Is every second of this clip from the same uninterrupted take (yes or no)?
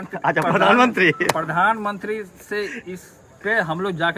yes